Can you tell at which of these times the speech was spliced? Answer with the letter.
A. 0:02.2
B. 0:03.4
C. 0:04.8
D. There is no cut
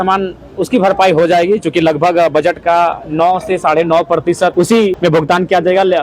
C